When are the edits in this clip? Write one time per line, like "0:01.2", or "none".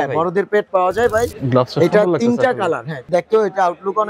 0:01.3
0:03.0